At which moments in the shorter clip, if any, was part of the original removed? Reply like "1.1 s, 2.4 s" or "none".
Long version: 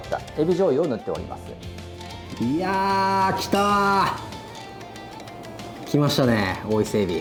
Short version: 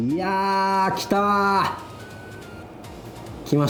none